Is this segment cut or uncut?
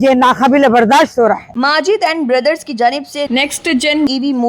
cut